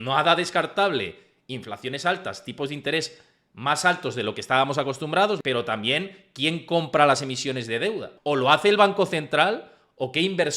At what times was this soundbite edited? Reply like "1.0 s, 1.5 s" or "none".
5.4 s, 8.1 s